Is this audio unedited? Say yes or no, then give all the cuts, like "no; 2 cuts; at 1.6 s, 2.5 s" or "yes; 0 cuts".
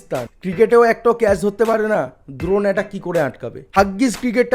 no; 1 cut; at 3.6 s